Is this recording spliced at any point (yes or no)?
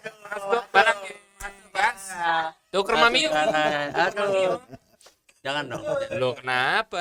no